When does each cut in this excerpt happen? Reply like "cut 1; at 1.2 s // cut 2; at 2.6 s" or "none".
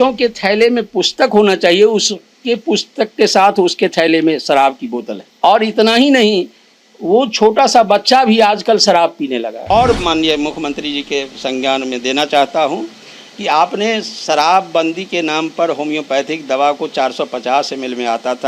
cut 1; at 5.2 s // cut 2; at 9.7 s